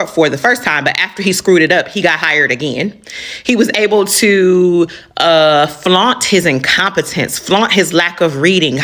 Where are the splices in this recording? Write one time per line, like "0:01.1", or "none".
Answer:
none